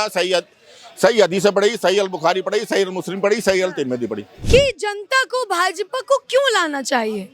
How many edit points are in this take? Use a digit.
1